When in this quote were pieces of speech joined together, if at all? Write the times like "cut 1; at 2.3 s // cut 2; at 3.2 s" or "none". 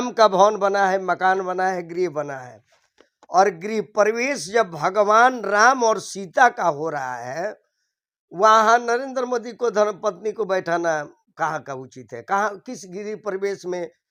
none